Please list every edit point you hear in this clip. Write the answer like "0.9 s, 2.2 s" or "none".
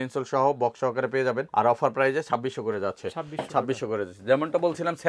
none